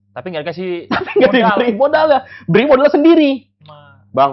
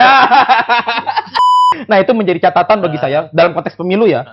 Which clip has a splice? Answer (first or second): second